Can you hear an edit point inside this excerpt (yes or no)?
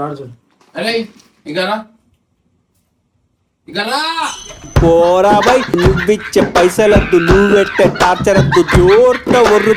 no